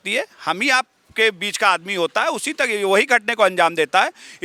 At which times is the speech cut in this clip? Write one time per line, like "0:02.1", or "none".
none